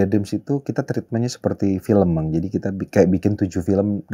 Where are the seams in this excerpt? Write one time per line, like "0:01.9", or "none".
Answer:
none